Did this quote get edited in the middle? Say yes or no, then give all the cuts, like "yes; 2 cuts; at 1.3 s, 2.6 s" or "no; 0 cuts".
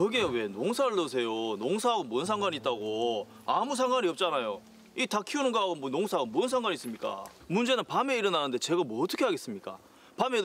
no; 0 cuts